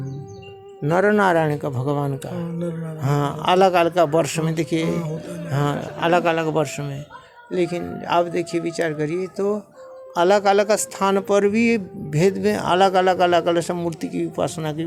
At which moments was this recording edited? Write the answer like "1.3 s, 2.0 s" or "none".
none

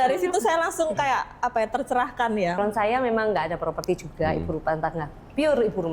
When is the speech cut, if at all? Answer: 2.6 s

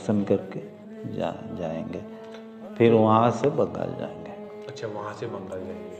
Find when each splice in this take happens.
none

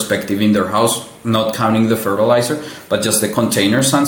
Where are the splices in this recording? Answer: none

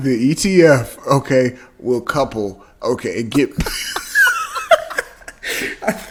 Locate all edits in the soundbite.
none

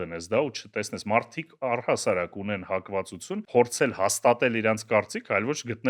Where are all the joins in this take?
3.4 s

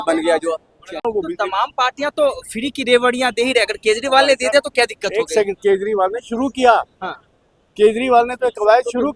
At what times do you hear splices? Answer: 1.0 s

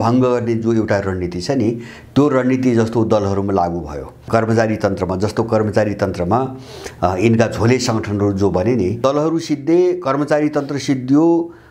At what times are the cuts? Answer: 4.2 s, 9.0 s

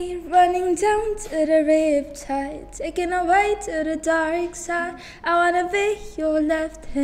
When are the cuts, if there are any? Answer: none

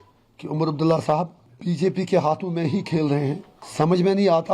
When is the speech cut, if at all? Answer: 1.4 s, 3.6 s

